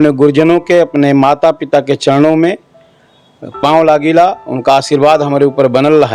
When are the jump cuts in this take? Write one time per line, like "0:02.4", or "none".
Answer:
none